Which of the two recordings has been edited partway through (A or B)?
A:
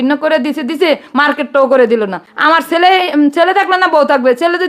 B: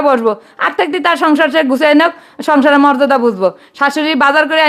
A